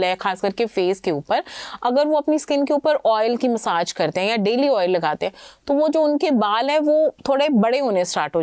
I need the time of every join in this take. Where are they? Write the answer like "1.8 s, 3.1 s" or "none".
none